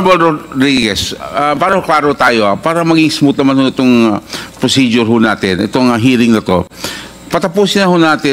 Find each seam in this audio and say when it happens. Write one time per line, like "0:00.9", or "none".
none